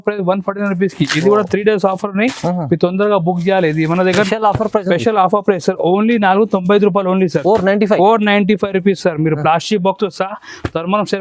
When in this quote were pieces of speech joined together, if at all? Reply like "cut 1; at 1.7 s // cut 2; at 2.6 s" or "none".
cut 1; at 4.3 s